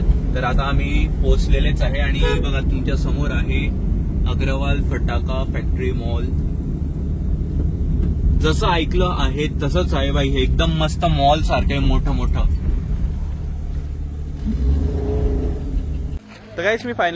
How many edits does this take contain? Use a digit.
0